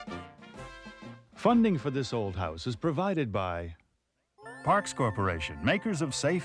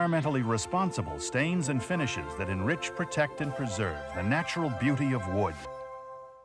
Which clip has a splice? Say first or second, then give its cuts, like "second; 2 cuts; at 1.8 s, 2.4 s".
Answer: first; 1 cut; at 1.4 s